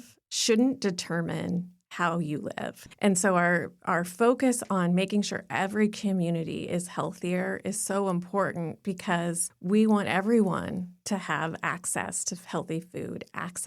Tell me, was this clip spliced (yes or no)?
yes